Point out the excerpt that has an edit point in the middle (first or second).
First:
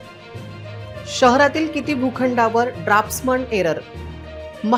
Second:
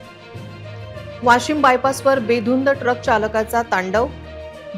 second